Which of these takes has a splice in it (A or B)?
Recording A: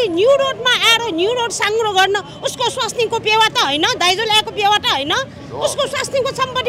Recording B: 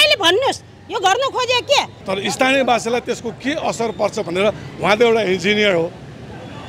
B